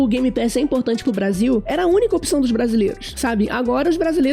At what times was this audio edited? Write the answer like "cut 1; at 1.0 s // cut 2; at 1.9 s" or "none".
cut 1; at 1.7 s // cut 2; at 3.1 s